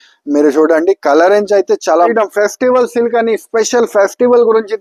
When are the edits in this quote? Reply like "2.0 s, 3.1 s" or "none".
2.1 s